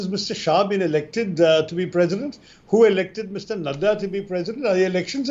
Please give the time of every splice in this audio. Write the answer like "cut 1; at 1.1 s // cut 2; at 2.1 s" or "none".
none